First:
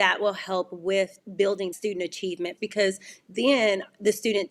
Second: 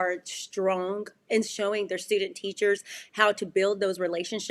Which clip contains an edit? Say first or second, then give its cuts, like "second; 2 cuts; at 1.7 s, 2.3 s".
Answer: second; 1 cut; at 1.3 s